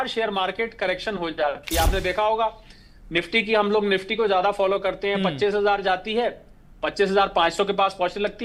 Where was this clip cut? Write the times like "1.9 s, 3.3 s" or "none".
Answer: none

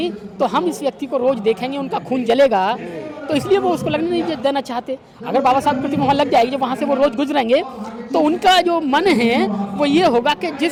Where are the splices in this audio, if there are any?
none

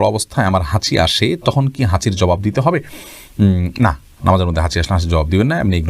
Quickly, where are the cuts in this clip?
none

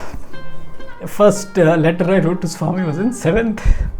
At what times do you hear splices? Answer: 1.0 s

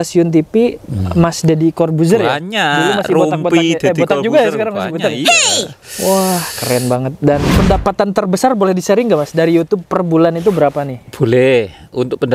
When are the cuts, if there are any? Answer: 7.5 s

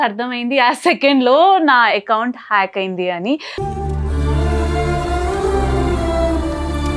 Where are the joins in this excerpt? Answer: none

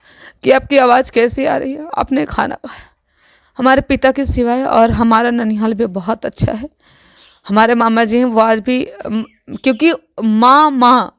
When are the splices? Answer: none

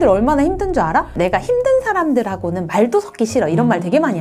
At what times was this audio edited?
1.1 s

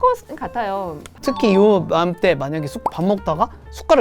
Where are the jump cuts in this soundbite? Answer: 1.2 s

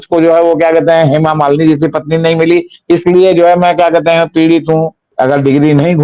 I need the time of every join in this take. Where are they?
5.0 s

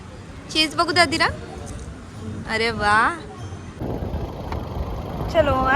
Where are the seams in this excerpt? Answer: 3.6 s

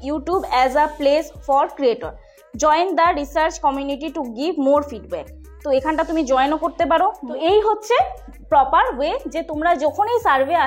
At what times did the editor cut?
7.2 s

